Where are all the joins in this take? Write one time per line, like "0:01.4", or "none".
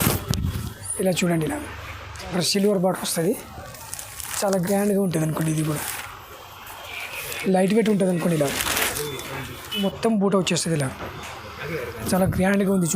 0:02.3
0:09.8